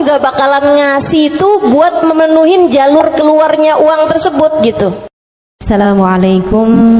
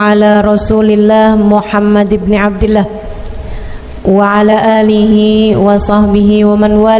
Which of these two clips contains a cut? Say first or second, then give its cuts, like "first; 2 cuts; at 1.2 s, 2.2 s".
first; 1 cut; at 5.6 s